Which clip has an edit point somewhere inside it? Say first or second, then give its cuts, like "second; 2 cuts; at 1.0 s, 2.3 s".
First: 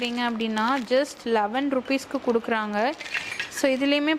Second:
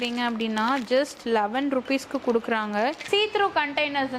second; 1 cut; at 3.0 s